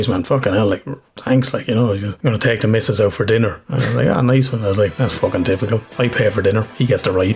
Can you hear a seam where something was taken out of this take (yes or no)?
yes